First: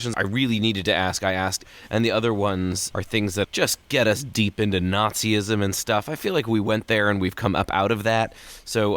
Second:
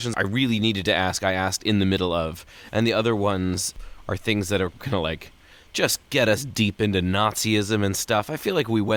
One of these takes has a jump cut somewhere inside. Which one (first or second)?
first